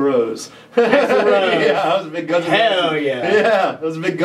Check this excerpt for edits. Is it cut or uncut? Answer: uncut